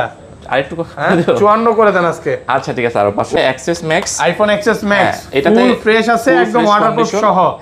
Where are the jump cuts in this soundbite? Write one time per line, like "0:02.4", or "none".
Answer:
0:03.4